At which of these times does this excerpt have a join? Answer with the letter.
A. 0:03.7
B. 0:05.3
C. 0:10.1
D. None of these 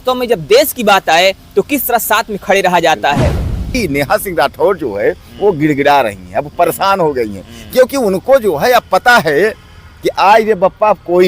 A